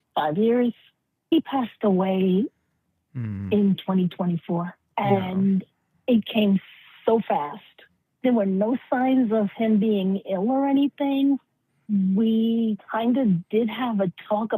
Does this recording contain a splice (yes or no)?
yes